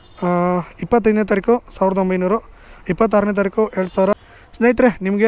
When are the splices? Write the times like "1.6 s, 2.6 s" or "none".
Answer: 4.4 s